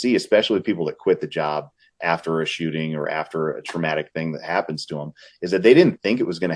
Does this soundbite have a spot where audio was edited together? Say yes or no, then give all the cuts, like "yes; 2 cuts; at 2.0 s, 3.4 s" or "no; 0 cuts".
no; 0 cuts